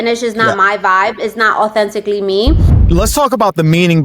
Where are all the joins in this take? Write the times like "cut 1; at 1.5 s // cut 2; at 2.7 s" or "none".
cut 1; at 2.7 s